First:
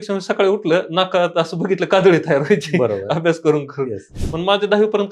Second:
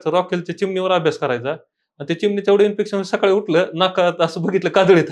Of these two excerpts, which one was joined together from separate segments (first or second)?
first